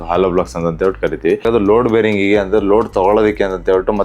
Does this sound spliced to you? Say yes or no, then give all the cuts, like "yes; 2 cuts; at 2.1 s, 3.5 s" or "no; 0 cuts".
yes; 1 cut; at 1.5 s